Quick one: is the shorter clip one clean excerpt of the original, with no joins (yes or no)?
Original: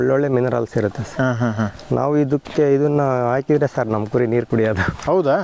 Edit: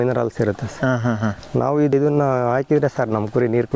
no